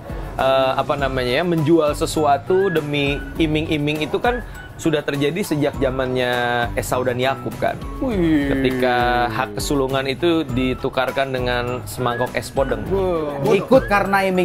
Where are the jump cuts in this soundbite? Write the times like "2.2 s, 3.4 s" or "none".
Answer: 13.1 s